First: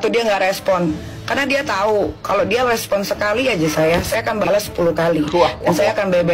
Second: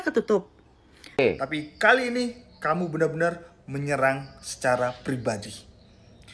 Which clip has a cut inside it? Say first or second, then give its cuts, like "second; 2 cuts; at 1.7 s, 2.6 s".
second; 1 cut; at 1.5 s